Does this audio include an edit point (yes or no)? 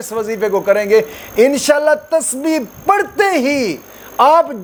no